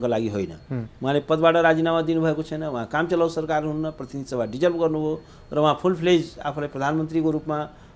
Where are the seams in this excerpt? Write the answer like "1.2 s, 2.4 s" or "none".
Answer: none